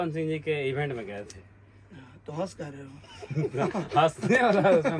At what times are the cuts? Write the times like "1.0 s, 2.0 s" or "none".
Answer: none